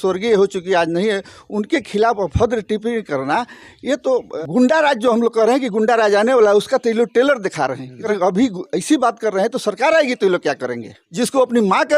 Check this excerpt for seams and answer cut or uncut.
cut